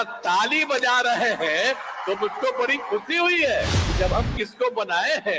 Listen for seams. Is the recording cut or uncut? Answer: cut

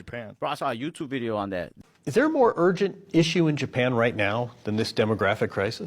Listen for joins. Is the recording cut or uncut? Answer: cut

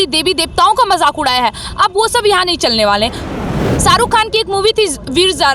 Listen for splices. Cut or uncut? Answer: cut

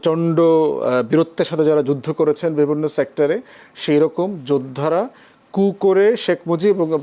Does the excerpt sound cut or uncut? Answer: uncut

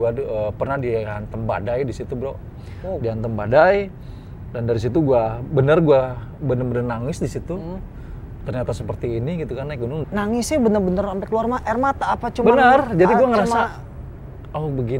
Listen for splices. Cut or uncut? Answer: cut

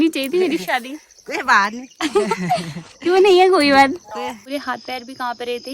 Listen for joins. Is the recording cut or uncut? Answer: cut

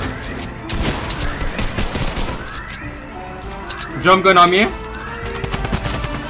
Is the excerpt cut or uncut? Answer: uncut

